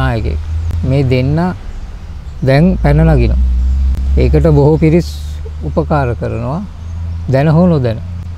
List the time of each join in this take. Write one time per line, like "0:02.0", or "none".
none